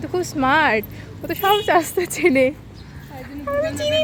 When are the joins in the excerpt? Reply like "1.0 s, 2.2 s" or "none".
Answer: none